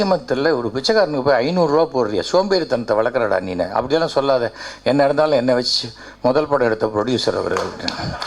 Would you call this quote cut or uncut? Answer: uncut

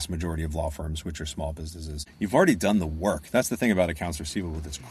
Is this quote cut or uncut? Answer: cut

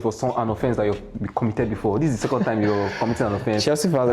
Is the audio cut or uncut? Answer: uncut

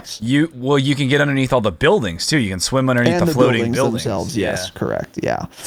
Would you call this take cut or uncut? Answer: uncut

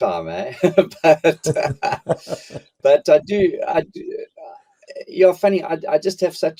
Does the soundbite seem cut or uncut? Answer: uncut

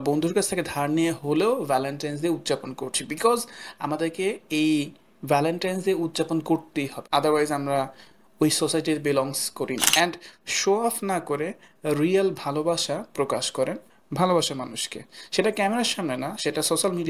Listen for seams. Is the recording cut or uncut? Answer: cut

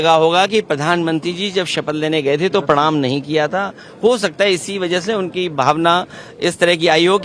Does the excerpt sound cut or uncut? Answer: uncut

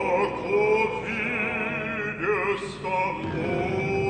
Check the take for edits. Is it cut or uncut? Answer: cut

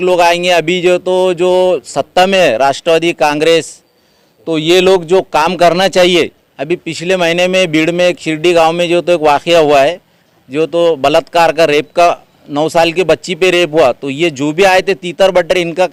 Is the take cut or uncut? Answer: uncut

